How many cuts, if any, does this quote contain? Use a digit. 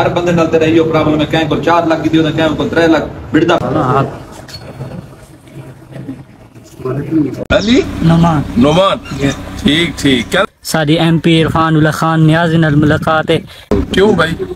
1